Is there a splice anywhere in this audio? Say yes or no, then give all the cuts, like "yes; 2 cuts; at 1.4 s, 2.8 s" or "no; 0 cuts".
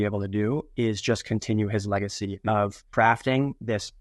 yes; 1 cut; at 2.8 s